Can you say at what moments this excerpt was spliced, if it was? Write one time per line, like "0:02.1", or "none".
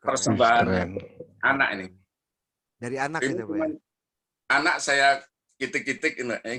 none